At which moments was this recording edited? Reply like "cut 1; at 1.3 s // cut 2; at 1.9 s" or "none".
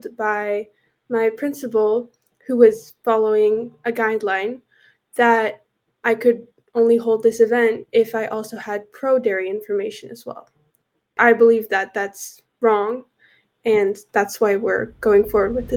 cut 1; at 5.9 s // cut 2; at 11.2 s